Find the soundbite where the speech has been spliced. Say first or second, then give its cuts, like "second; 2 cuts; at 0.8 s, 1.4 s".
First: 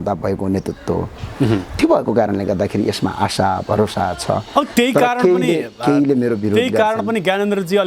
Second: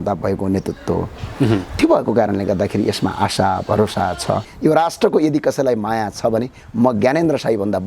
second; 1 cut; at 4.4 s